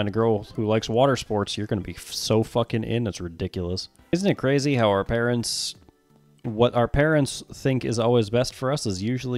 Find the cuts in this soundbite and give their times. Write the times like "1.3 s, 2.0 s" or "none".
3.9 s